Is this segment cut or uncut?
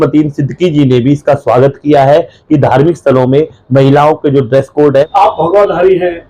cut